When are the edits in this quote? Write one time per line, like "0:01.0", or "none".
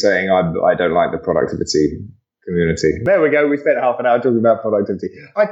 0:03.1